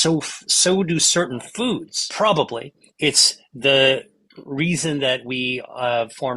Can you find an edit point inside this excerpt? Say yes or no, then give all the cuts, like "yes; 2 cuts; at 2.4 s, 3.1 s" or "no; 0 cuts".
yes; 1 cut; at 2.0 s